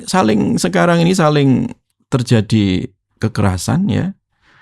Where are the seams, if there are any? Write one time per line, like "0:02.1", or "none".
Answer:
0:01.8